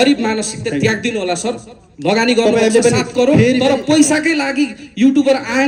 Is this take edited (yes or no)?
no